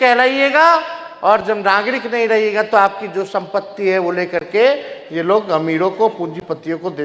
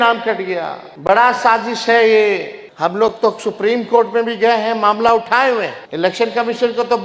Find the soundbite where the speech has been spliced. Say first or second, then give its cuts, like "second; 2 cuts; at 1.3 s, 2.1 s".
second; 3 cuts; at 0.9 s, 2.6 s, 5.8 s